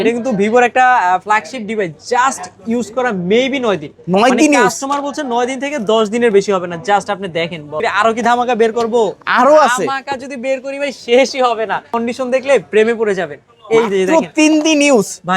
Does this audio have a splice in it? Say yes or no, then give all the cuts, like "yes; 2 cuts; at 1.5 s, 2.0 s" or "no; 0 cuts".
yes; 2 cuts; at 7.7 s, 12.0 s